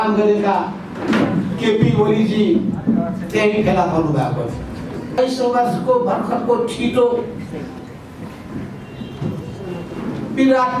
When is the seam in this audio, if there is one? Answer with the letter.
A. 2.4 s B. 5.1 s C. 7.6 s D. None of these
B